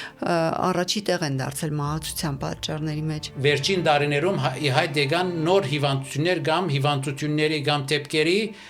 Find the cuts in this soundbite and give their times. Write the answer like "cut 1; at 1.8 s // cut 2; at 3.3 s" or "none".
cut 1; at 3.2 s